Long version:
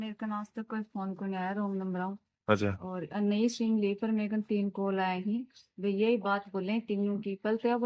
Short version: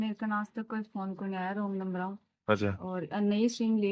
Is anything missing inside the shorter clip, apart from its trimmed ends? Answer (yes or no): no